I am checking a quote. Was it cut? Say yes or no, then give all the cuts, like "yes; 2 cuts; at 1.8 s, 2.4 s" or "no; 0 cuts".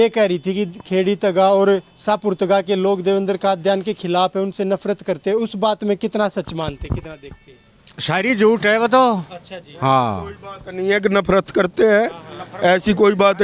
no; 0 cuts